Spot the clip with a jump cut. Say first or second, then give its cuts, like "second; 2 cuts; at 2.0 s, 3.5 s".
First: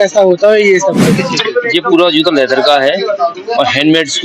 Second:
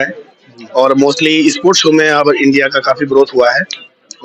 first; 1 cut; at 1.2 s